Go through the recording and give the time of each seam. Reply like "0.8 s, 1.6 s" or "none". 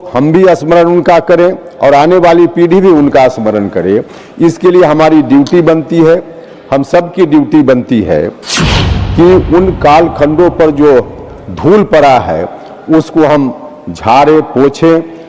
none